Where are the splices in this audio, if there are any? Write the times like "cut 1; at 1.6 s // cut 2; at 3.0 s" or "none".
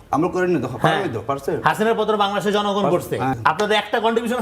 cut 1; at 3.3 s